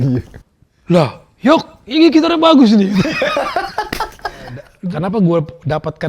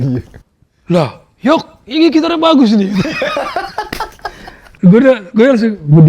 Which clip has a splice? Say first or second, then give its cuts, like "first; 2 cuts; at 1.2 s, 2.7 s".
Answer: first; 1 cut; at 4.6 s